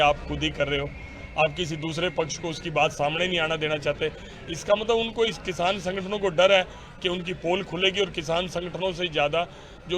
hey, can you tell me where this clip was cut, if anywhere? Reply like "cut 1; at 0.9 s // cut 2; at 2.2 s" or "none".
none